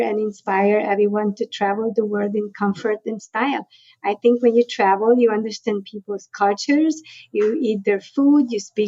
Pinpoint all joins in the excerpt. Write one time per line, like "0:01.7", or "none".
none